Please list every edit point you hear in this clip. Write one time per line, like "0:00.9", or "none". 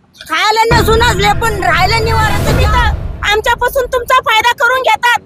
0:02.6